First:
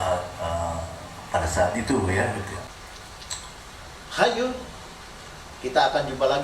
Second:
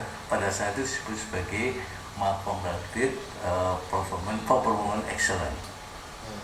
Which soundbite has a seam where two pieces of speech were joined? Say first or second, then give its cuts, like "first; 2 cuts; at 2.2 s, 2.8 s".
first; 1 cut; at 2.7 s